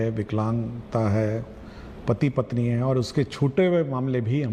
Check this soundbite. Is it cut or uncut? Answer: uncut